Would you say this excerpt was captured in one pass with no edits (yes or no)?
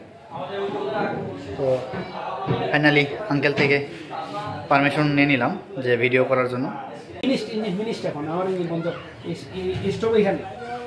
no